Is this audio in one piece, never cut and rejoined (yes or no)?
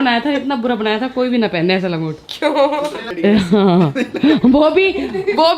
yes